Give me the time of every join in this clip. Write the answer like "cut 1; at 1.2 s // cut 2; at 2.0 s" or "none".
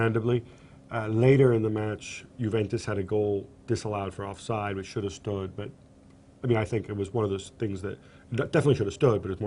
cut 1; at 3.7 s